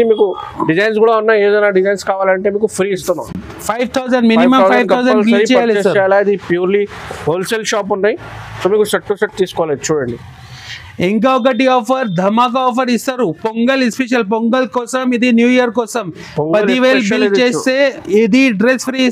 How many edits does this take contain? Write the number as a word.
zero